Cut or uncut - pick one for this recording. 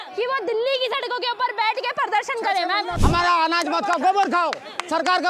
cut